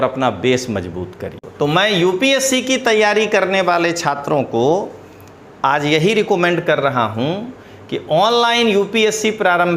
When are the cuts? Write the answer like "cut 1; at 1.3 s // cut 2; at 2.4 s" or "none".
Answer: cut 1; at 1.4 s